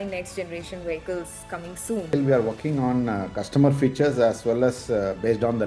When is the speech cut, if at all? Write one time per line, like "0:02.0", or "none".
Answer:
0:02.1